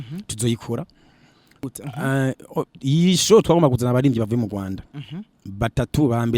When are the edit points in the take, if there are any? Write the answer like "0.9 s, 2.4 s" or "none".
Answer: 1.7 s